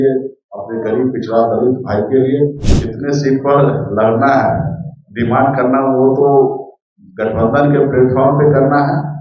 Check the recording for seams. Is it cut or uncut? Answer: cut